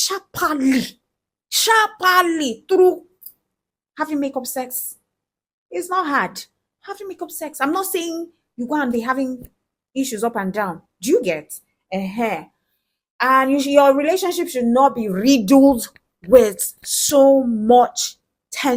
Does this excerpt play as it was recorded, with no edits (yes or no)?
yes